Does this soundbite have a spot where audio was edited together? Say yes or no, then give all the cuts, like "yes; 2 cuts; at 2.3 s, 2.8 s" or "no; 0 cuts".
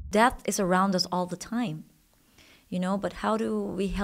no; 0 cuts